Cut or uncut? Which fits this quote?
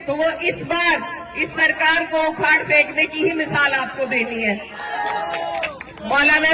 cut